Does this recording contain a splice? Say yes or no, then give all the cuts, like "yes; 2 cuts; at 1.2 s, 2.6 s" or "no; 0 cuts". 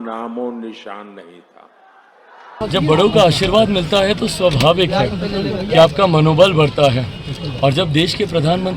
yes; 1 cut; at 2.6 s